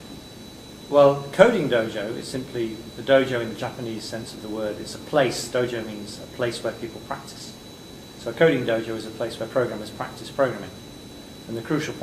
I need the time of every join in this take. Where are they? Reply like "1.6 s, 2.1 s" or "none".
1.7 s